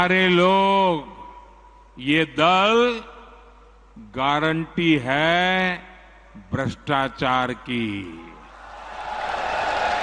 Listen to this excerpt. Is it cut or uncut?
uncut